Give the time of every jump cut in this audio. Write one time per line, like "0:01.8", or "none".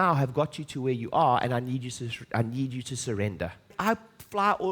0:03.7

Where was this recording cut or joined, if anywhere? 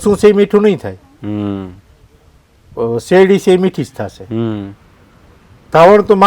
none

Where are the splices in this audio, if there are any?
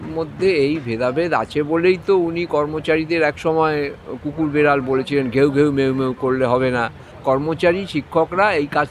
0:07.1

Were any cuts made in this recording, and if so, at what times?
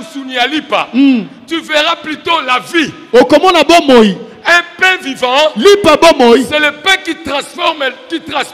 none

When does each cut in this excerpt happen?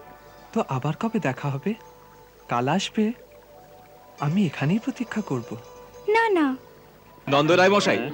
0:07.2

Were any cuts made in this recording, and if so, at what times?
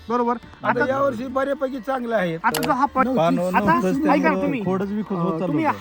0:03.0

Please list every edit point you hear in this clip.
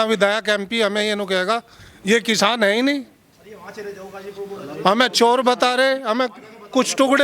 none

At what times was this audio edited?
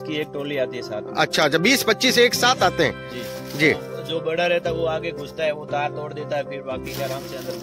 none

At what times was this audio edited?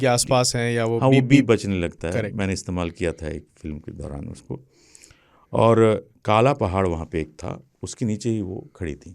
none

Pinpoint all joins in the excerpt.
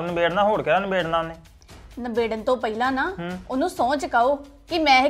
none

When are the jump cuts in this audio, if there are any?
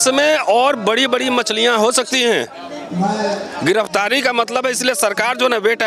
none

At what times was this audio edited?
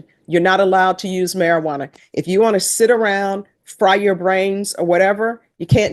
none

